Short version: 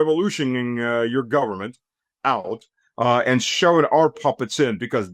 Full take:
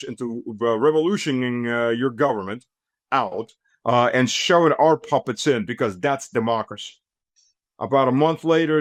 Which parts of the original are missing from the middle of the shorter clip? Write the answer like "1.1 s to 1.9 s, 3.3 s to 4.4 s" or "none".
none